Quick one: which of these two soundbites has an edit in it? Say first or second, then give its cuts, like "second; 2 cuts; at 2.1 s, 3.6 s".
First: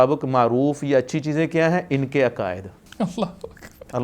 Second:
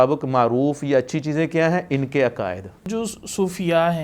second; 1 cut; at 2.9 s